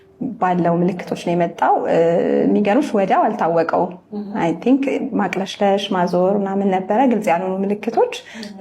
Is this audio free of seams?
yes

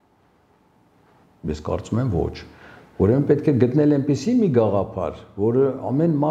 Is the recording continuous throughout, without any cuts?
yes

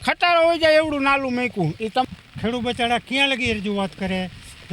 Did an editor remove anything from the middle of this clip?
yes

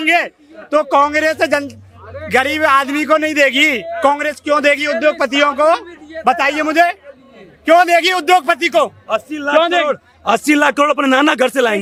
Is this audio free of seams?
yes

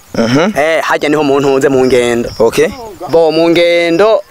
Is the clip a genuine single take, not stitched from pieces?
yes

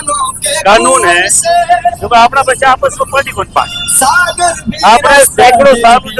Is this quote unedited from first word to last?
yes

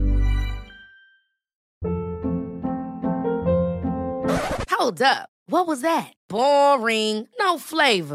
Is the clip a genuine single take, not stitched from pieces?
no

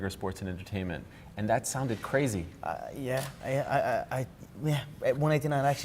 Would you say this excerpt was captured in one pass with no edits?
no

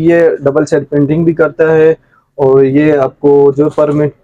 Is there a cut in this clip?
no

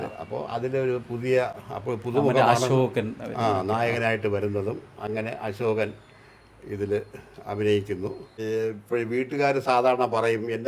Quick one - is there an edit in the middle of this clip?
yes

